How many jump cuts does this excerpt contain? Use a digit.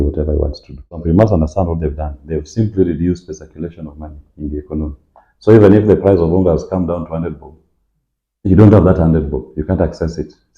1